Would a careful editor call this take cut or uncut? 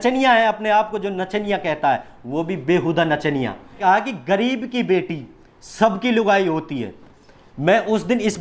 cut